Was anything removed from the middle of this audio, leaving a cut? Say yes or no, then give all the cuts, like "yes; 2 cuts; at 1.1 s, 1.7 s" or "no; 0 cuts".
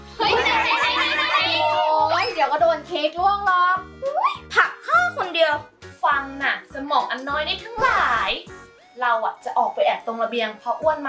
yes; 1 cut; at 5.8 s